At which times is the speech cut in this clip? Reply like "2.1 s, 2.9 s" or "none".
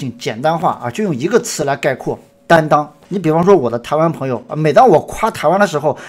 3.0 s